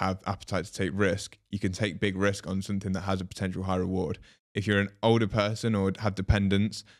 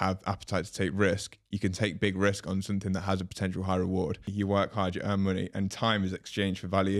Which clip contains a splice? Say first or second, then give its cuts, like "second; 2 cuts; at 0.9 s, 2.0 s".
second; 1 cut; at 4.3 s